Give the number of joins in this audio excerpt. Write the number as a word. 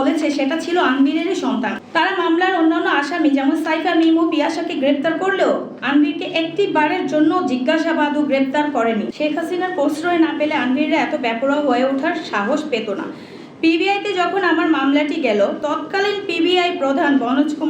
three